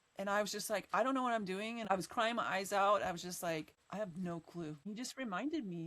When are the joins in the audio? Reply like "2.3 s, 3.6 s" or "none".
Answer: 1.8 s, 3.8 s, 4.9 s